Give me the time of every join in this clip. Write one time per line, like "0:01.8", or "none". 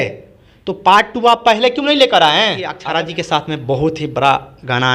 0:02.8